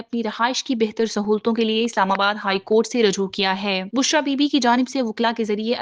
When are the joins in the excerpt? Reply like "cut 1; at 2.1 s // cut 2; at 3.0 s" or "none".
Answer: none